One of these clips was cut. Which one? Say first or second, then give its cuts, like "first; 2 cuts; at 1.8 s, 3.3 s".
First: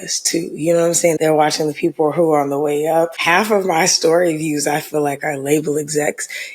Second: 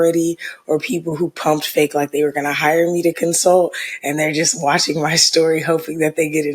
first; 2 cuts; at 1.2 s, 3.2 s